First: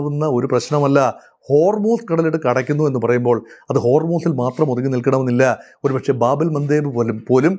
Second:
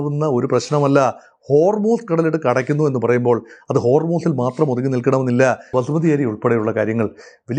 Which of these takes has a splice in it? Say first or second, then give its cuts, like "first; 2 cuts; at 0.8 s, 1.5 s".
second; 1 cut; at 5.7 s